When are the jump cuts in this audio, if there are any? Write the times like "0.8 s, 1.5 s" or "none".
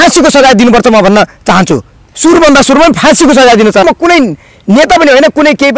3.8 s